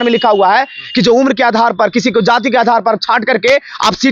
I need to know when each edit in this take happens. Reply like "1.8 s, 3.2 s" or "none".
none